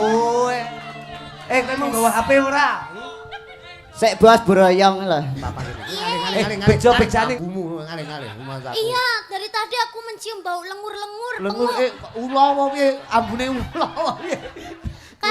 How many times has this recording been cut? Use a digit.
1